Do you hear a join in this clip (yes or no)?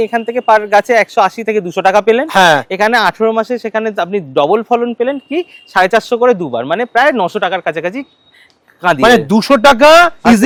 no